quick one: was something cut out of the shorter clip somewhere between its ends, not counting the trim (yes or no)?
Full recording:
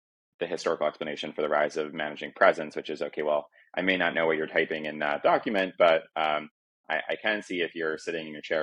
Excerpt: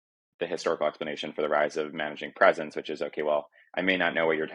no